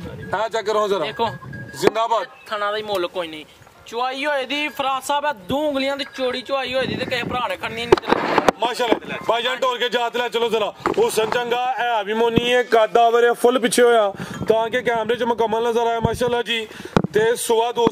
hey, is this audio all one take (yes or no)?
yes